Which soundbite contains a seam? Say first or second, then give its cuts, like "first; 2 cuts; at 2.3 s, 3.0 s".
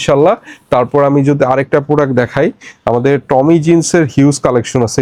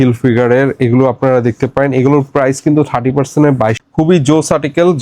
second; 1 cut; at 3.8 s